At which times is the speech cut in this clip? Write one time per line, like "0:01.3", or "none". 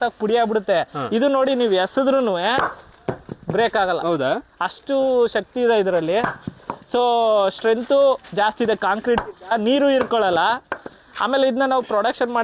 none